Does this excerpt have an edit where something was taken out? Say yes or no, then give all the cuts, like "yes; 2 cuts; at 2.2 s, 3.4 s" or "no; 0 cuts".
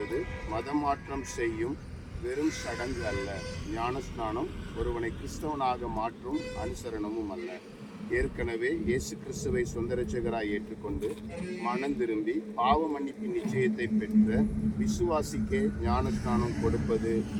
no; 0 cuts